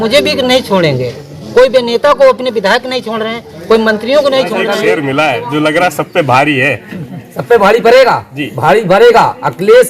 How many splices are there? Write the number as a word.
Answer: one